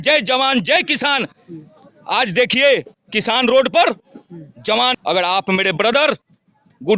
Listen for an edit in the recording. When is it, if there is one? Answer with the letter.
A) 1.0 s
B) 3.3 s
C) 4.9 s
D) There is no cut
C